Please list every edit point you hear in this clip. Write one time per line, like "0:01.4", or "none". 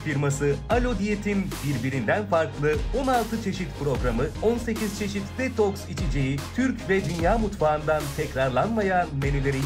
none